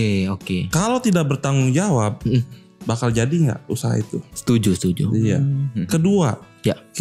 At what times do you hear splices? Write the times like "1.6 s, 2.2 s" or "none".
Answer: none